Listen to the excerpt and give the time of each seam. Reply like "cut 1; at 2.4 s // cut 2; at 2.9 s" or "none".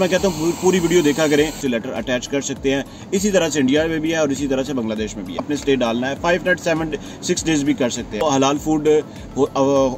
cut 1; at 1.6 s // cut 2; at 5.5 s // cut 3; at 8.2 s